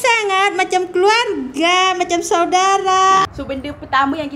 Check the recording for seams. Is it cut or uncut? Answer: cut